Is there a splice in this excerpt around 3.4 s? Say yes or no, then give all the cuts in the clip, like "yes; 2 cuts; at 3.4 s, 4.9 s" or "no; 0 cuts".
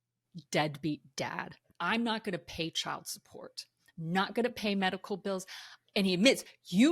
no; 2 cuts; at 1.7 s, 5.7 s